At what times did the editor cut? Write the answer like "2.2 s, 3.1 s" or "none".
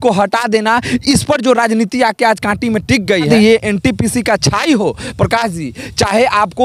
3.3 s